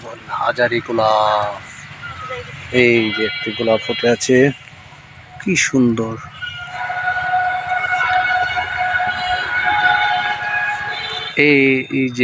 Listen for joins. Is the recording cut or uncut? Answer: cut